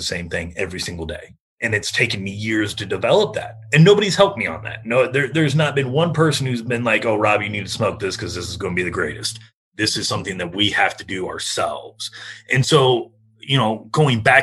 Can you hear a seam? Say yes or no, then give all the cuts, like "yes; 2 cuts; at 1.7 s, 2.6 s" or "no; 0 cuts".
no; 0 cuts